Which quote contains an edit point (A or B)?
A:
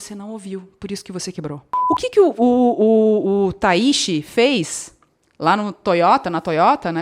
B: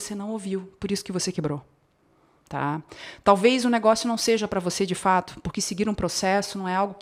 A